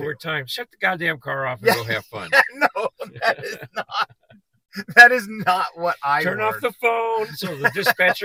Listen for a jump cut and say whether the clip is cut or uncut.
uncut